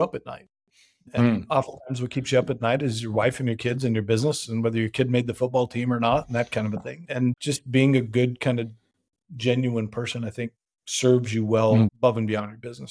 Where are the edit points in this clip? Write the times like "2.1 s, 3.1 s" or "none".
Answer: 7.4 s, 11.9 s